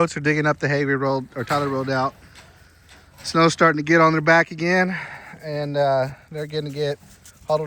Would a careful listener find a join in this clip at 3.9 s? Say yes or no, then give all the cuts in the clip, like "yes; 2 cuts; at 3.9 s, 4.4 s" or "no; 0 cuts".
no; 0 cuts